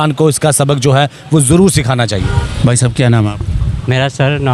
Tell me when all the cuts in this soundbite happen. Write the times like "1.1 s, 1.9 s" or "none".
none